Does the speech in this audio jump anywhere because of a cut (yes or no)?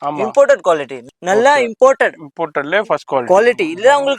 yes